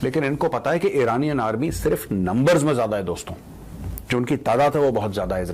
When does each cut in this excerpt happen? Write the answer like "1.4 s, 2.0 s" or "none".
none